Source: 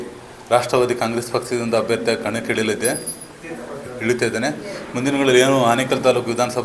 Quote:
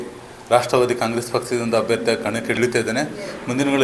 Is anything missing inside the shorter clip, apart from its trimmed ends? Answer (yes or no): yes